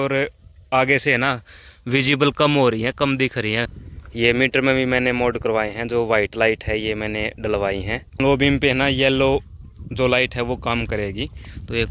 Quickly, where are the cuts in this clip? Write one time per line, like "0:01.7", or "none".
0:03.8
0:08.2